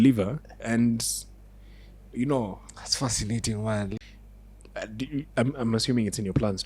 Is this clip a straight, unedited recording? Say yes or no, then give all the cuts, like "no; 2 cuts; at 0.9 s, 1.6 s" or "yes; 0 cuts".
no; 1 cut; at 4.0 s